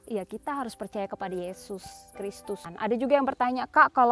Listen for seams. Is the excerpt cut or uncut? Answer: cut